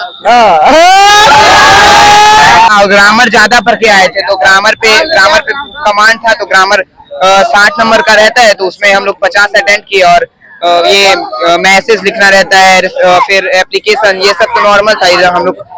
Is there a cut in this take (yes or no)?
yes